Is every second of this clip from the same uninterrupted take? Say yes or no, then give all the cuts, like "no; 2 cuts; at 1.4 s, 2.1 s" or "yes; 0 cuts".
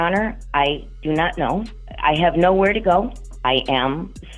no; 2 cuts; at 1.8 s, 3.2 s